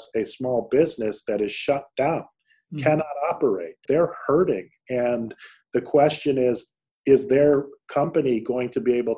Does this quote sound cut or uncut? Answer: cut